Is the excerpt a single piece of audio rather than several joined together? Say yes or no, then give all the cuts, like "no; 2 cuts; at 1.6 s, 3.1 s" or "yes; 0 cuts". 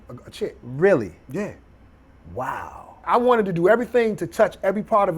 no; 1 cut; at 3.0 s